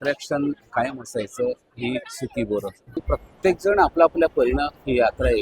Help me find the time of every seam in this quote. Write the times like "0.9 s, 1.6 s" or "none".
3.0 s